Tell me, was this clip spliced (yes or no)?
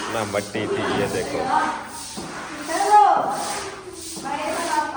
no